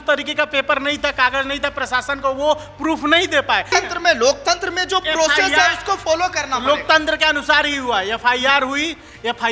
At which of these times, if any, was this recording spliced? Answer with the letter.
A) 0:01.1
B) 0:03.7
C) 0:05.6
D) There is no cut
B